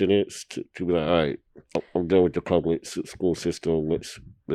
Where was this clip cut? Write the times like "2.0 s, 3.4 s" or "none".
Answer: none